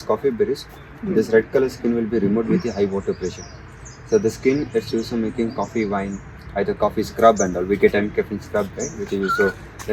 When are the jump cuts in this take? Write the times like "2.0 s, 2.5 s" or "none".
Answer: none